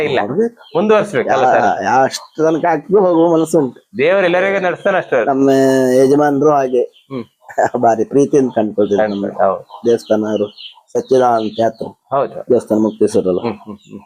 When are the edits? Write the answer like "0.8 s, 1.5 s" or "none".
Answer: none